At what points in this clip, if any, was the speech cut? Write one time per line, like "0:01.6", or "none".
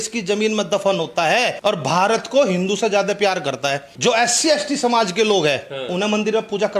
0:01.5
0:03.9

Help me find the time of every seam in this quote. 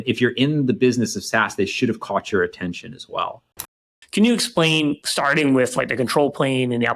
0:04.0
0:05.0

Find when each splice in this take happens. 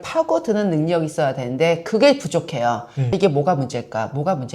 0:03.2

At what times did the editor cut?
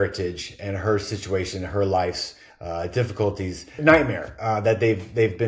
0:03.8

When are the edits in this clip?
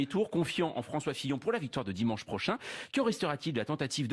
0:02.4

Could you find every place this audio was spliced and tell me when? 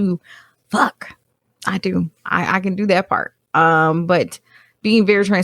none

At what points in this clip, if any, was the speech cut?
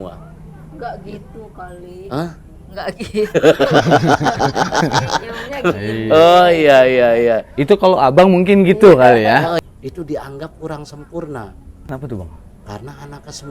0:09.6
0:11.9

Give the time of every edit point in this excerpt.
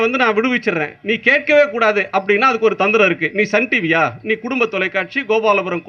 none

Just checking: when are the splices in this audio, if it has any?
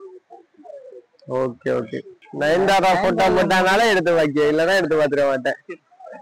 0:02.2

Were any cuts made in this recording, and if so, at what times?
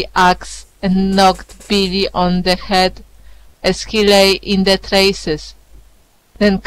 none

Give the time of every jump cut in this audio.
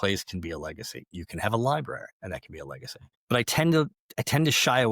0:02.1

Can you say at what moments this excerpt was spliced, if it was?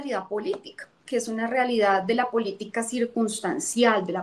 none

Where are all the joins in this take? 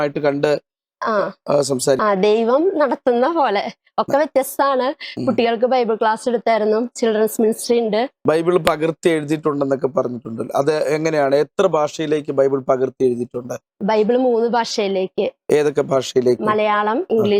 0:02.0
0:08.1

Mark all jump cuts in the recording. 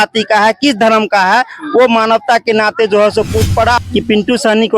0:03.8

